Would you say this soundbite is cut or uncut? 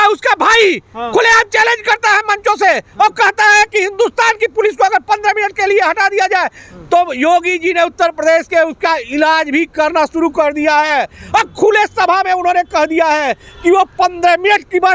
uncut